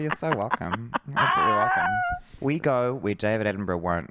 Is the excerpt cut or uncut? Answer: cut